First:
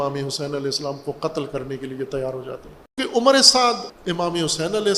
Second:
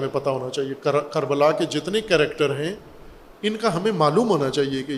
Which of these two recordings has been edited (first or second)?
first